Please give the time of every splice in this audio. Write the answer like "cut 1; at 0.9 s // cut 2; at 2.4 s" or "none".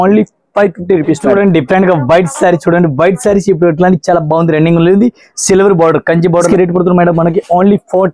cut 1; at 1.3 s // cut 2; at 6.5 s